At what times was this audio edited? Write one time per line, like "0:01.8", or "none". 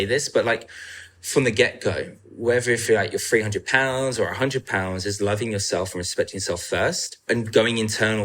0:07.3